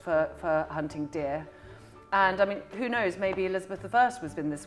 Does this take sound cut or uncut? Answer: uncut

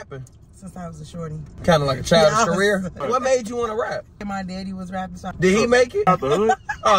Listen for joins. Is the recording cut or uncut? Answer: cut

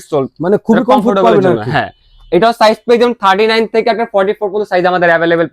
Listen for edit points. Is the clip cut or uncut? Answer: uncut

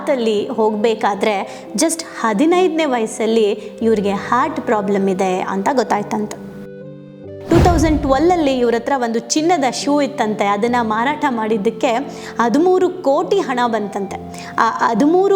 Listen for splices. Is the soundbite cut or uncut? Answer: cut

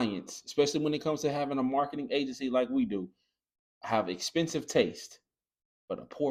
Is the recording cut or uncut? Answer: uncut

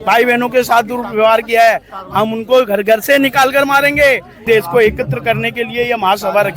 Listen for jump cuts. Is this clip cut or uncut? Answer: cut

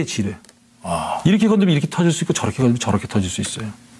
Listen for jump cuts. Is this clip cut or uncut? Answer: uncut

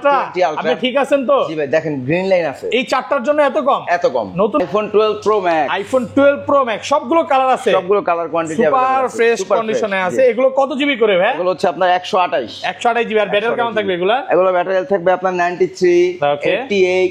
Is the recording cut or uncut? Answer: cut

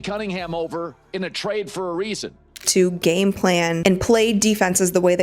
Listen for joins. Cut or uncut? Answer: cut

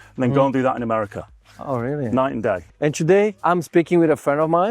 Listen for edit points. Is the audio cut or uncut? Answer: cut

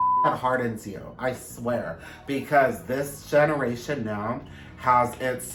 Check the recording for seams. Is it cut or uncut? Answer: uncut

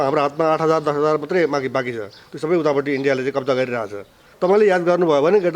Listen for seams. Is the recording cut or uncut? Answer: cut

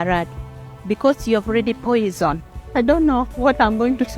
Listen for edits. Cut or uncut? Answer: cut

